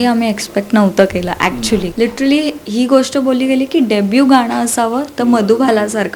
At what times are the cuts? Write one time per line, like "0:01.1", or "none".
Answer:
0:01.9